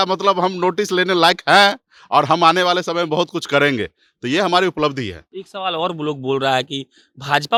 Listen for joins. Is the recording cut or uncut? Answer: uncut